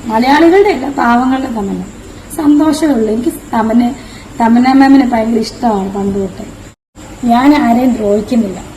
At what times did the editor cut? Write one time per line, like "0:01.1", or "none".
0:06.6